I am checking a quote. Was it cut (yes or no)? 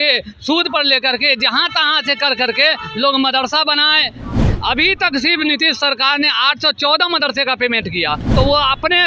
yes